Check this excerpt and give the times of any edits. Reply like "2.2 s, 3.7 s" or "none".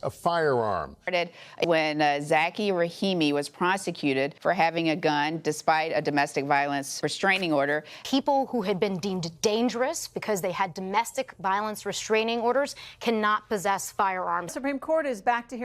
0.9 s, 8.0 s, 14.5 s